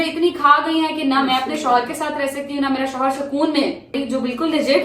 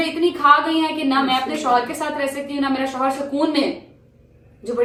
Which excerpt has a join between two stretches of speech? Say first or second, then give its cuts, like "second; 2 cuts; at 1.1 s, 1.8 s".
first; 1 cut; at 3.9 s